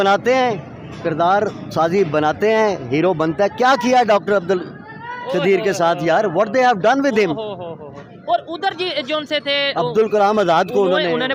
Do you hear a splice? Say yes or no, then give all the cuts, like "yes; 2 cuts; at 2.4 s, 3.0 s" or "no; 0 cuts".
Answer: no; 0 cuts